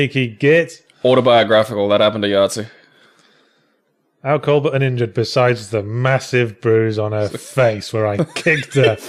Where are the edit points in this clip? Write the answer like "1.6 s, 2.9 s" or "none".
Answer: none